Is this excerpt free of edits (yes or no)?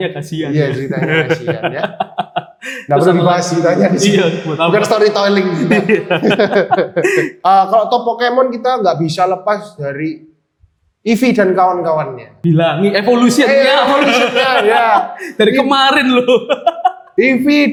yes